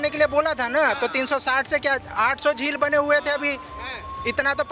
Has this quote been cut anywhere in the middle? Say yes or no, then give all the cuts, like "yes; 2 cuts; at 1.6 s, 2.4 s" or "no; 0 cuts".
no; 0 cuts